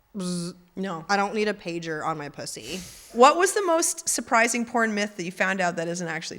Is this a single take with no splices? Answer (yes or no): no